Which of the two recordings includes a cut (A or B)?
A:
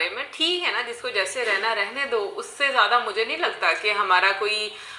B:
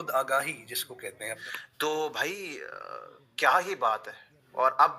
B